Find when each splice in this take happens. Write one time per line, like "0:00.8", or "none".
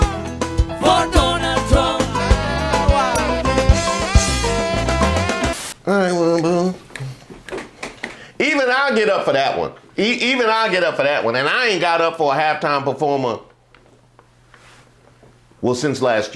none